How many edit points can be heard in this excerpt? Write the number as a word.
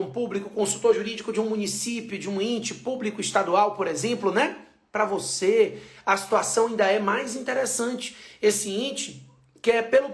zero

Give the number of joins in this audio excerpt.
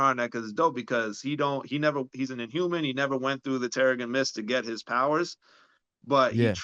zero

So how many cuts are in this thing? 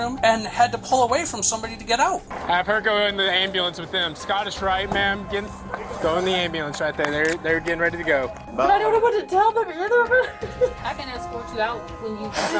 four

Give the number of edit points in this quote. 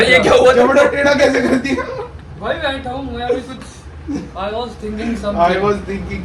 zero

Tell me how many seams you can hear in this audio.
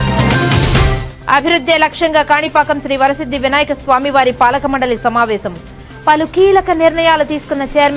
zero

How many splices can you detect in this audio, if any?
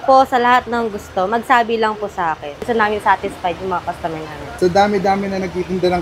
two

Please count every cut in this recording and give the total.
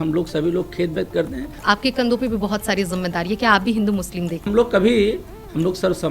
two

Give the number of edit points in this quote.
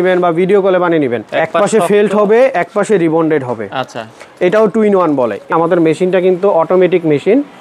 two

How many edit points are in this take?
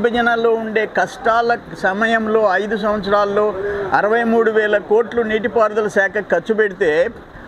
zero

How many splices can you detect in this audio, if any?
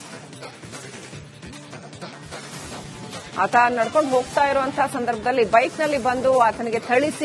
one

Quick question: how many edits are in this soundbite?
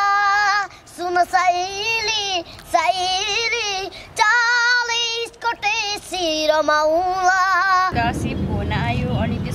one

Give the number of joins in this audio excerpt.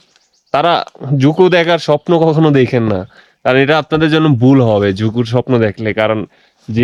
zero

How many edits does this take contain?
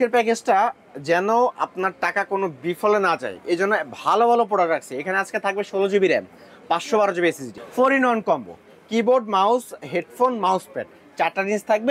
one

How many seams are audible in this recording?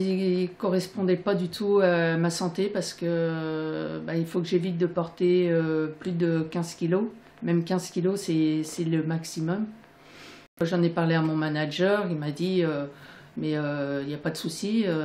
one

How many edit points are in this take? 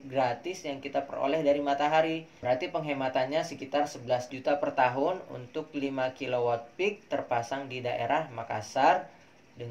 two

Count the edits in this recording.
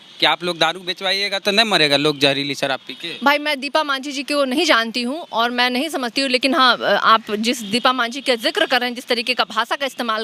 zero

